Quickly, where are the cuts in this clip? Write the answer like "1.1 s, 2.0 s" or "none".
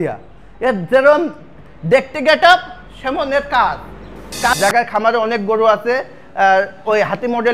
4.5 s